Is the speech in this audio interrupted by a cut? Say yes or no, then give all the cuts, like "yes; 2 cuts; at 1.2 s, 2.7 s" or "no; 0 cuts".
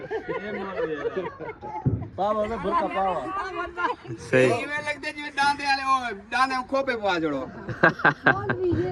no; 0 cuts